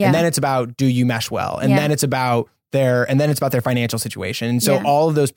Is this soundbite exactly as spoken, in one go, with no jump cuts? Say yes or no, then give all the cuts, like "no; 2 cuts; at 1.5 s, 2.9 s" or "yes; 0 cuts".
yes; 0 cuts